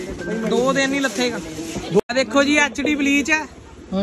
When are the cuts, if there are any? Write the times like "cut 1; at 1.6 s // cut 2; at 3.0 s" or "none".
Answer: cut 1; at 2.0 s